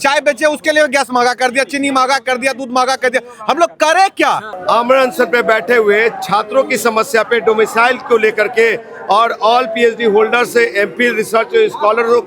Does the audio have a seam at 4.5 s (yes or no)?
yes